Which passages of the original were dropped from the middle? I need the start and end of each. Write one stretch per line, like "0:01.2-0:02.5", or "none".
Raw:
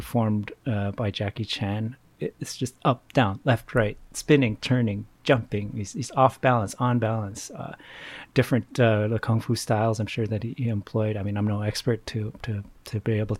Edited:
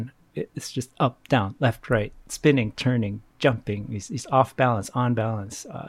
none